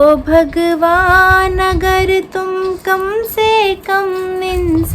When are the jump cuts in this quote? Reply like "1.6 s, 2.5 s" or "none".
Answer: none